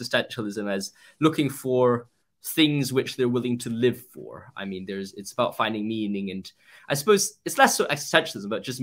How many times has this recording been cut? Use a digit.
0